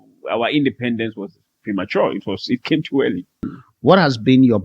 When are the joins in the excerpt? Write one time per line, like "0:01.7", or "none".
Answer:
0:03.6